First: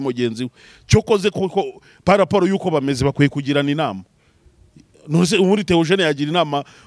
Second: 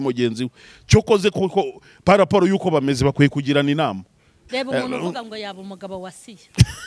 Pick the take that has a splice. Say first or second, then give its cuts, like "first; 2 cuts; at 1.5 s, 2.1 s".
second; 1 cut; at 4.4 s